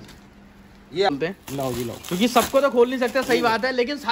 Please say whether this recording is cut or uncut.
cut